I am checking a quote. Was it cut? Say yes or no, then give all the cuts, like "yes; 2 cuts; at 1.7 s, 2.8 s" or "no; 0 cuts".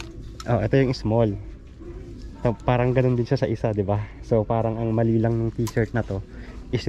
no; 0 cuts